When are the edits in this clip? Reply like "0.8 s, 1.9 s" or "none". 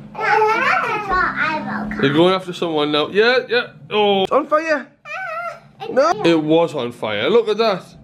4.2 s, 6.1 s